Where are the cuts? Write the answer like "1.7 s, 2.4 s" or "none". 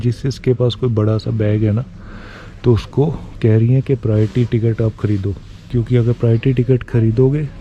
none

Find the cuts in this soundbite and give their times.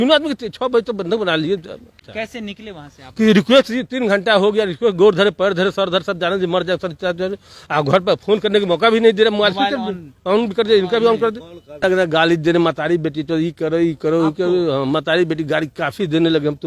2.0 s, 11.8 s

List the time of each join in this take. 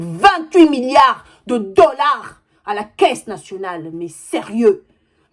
none

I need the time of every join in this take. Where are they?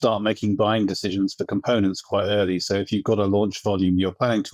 none

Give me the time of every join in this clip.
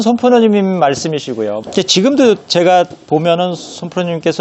1.6 s

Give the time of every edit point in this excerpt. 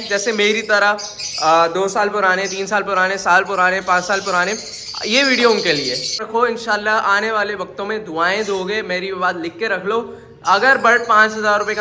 6.2 s

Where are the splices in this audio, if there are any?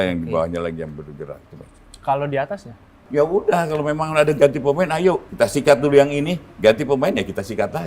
3.0 s, 5.3 s

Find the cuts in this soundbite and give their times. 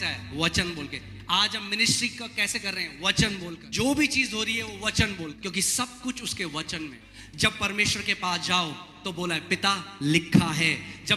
3.6 s, 5.4 s, 7.0 s

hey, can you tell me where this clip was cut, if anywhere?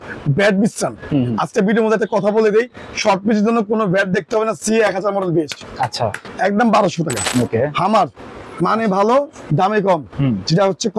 6.3 s, 7.2 s

